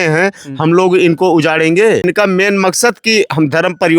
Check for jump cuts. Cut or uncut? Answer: cut